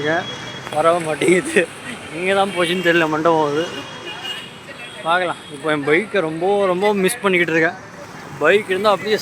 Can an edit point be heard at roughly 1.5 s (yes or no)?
no